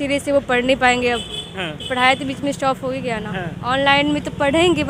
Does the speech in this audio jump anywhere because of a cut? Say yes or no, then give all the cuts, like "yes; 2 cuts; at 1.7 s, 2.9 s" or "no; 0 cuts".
no; 0 cuts